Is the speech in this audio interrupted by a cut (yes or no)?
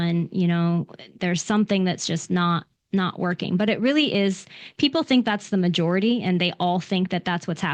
no